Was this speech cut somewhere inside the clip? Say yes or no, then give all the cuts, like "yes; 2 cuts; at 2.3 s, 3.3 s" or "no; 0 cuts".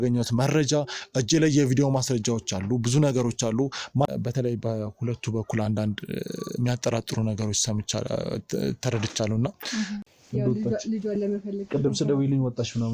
yes; 2 cuts; at 4.1 s, 10.0 s